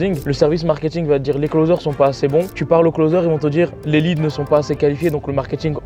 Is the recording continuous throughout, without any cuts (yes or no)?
yes